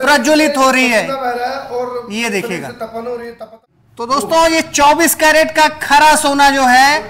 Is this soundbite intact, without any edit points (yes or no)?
no